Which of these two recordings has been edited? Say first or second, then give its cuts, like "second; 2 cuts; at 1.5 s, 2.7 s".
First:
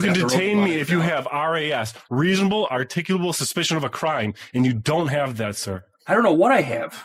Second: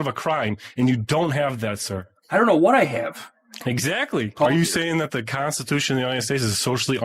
second; 1 cut; at 4.4 s